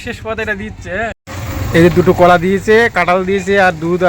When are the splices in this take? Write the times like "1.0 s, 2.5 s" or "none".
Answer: 1.3 s

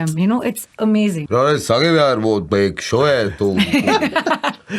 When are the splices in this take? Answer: 1.2 s

